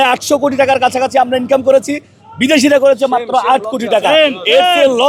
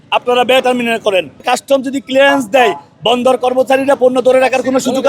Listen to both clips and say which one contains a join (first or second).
second